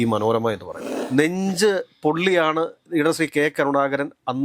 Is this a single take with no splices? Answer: no; 1 cut; at 0.9 s

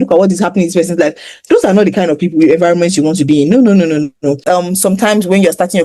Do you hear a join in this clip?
yes; 1 cut; at 4.4 s

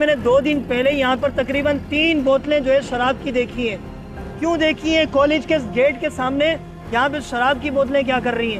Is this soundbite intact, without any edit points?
yes; 0 cuts

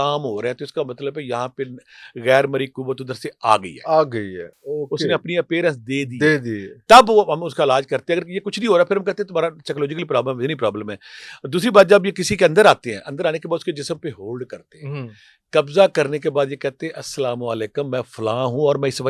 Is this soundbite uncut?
yes; 0 cuts

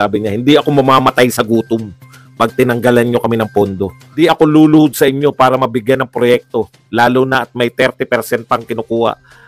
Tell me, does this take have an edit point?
yes; 1 cut; at 4.0 s

